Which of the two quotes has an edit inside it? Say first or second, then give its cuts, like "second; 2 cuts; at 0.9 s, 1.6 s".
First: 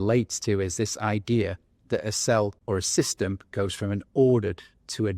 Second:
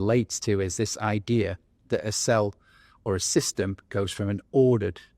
first; 1 cut; at 2.6 s